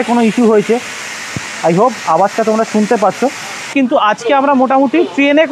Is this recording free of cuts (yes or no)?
no